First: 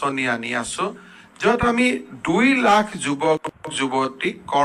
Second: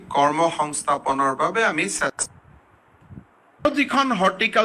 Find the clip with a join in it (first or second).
second